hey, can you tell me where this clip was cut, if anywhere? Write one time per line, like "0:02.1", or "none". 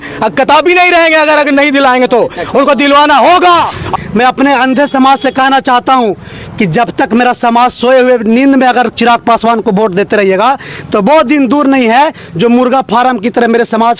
0:03.9

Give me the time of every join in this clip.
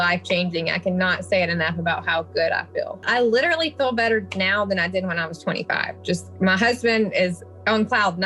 0:03.0

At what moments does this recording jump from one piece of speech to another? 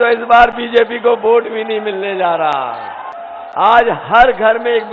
0:03.1

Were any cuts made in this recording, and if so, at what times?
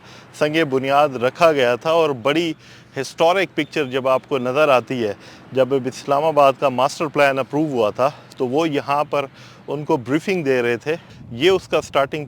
0:11.1

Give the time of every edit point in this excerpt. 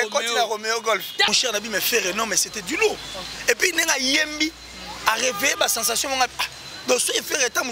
0:01.3

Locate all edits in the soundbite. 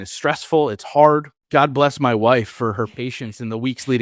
0:01.4

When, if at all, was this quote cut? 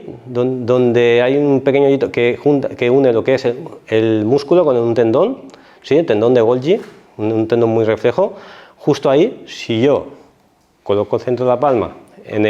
none

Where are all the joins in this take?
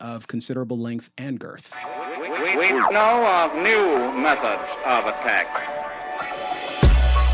0:01.7

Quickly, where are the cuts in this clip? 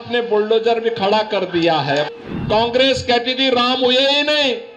0:02.1

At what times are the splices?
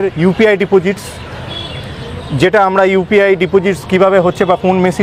none

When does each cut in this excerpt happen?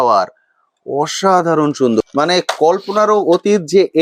0:02.0

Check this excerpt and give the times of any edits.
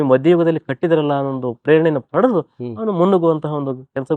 none

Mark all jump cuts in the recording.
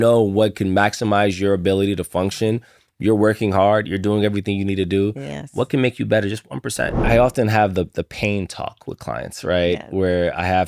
0:07.0

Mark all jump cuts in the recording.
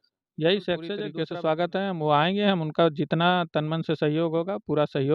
0:01.1

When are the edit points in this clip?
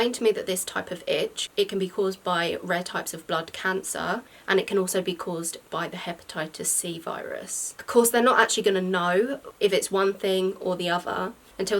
0:01.4
0:07.7

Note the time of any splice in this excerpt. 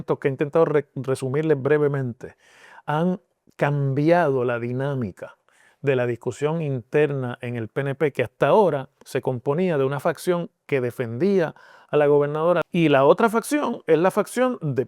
0:12.6

